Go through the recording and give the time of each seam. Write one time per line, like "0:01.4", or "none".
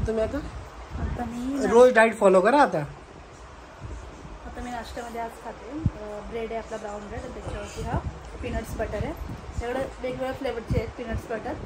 none

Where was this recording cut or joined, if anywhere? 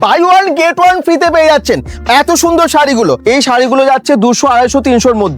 0:03.2

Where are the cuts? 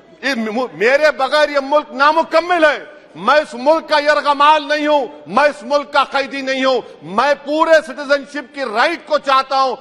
none

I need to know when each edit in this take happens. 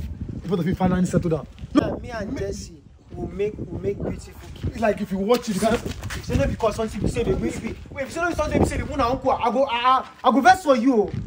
0:01.8

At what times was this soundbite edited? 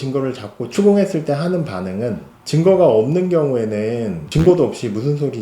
0:02.3

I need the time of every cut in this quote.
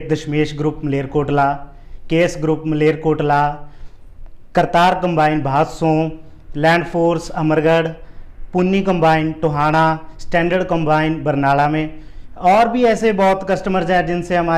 none

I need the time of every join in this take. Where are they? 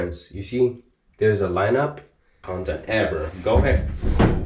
0:02.4

